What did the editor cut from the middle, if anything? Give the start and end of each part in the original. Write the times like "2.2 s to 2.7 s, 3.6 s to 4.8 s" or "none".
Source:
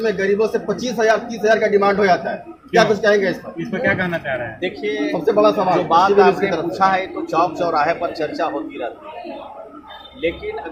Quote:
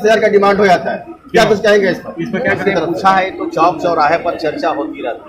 4.0 s to 6.4 s